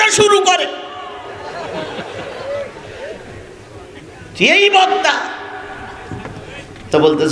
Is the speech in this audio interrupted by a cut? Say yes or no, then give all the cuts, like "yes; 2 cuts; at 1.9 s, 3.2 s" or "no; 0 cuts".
no; 0 cuts